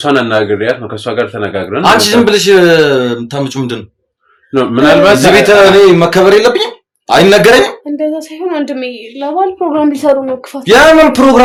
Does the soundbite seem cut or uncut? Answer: uncut